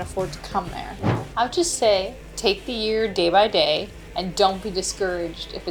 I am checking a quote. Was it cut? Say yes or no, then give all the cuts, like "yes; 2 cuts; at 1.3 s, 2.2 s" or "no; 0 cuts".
yes; 3 cuts; at 1.0 s, 2.2 s, 4.0 s